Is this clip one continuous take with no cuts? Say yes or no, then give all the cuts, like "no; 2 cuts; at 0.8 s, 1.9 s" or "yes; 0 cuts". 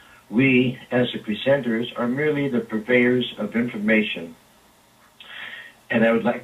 yes; 0 cuts